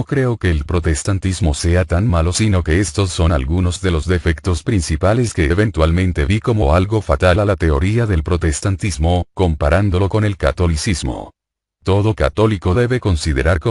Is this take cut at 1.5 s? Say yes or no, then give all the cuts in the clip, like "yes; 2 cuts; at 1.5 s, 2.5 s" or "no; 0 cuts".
no; 1 cut; at 4.9 s